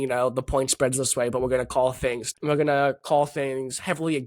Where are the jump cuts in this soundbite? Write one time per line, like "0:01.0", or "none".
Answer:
0:02.3